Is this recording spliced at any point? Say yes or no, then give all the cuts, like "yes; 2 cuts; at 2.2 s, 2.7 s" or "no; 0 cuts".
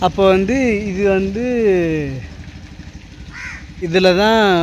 no; 0 cuts